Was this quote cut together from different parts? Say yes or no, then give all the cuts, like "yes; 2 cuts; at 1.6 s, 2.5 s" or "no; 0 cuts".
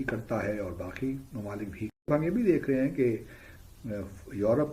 yes; 1 cut; at 1.8 s